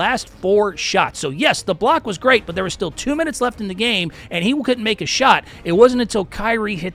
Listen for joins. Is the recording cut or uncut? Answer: uncut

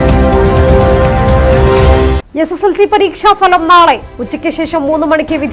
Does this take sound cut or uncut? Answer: uncut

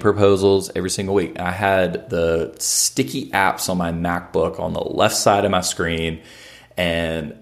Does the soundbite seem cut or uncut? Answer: uncut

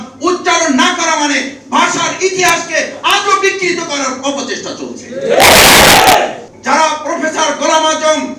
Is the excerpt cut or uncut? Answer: cut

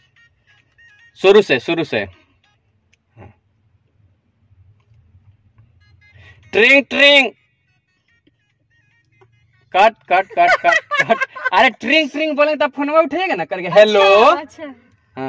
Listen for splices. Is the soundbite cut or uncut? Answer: uncut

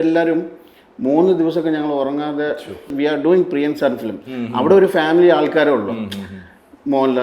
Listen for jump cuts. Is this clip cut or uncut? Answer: cut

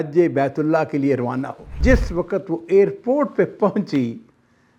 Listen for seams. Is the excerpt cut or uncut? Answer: cut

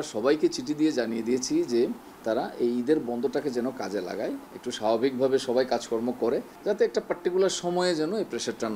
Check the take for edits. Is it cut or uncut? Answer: cut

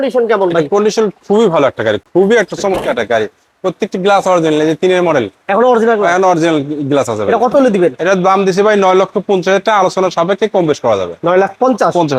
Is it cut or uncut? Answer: uncut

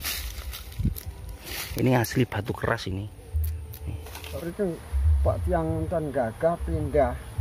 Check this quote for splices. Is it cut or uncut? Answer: cut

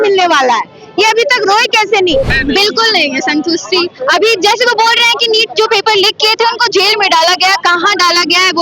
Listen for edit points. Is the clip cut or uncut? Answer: cut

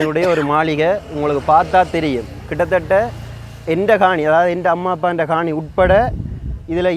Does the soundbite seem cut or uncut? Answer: uncut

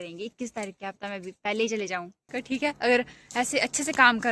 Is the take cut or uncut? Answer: cut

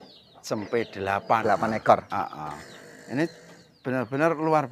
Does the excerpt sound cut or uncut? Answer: cut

